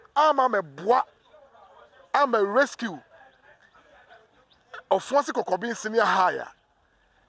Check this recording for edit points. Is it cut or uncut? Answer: uncut